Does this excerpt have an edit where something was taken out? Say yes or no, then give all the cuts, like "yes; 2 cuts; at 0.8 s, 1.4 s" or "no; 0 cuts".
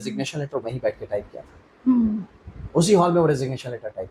no; 0 cuts